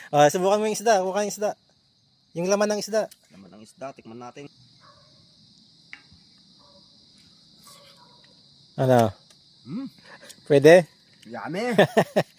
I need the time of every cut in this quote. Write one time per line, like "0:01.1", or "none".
0:04.5